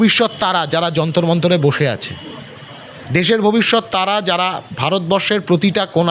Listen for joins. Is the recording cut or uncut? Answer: uncut